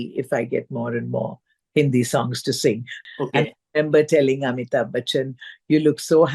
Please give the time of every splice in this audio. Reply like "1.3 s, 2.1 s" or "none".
2.9 s